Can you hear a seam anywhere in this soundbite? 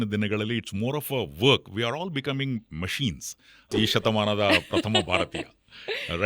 yes; 1 cut; at 3.7 s

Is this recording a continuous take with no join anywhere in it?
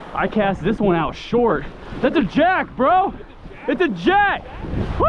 yes; 0 cuts

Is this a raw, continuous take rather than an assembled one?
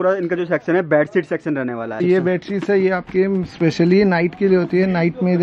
no; 1 cut; at 2.0 s

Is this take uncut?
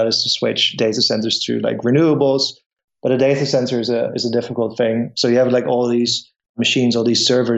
yes; 0 cuts

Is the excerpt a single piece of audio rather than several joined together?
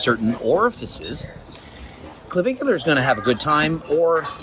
no; 1 cut; at 1.4 s

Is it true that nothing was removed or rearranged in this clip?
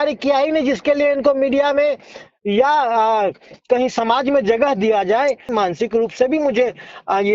no; 1 cut; at 5.5 s

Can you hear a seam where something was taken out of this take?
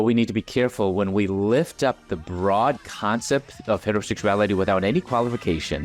no; 0 cuts

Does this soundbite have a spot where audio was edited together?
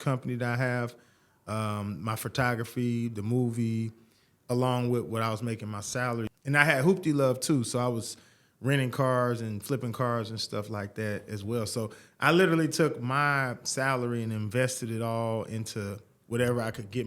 yes; 1 cut; at 6.3 s

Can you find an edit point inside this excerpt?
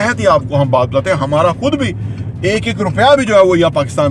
no; 0 cuts

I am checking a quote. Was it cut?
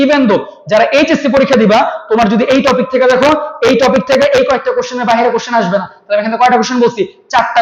no; 0 cuts

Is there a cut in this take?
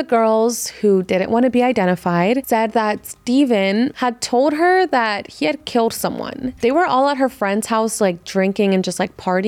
yes; 2 cuts; at 2.4 s, 4.0 s

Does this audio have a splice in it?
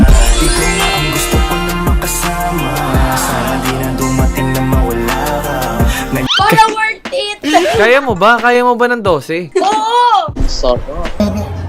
no; 0 cuts

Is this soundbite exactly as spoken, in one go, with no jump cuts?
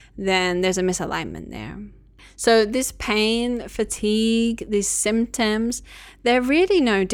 no; 1 cut; at 2.3 s

